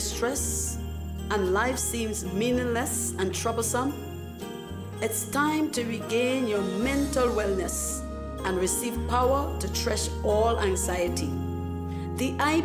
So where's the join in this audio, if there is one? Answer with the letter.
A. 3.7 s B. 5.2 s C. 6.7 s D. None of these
D